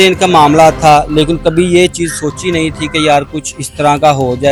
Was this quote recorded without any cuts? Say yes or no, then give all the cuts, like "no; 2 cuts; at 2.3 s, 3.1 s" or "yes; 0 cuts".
yes; 0 cuts